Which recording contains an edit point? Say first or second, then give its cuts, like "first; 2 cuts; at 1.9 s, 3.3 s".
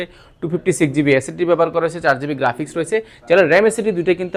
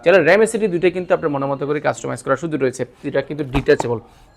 second; 1 cut; at 3.0 s